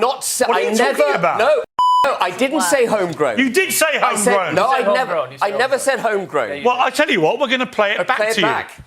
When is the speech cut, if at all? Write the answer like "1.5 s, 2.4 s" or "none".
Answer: 2.0 s